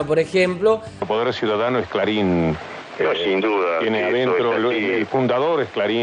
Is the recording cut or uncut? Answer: cut